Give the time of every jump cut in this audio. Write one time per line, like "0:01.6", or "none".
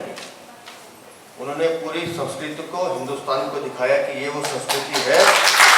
none